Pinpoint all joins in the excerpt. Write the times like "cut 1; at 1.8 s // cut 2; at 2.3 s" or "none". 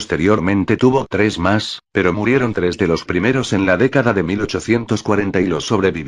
none